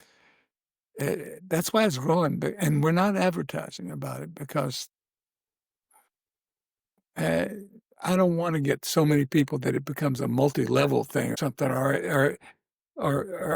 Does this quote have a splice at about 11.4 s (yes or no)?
yes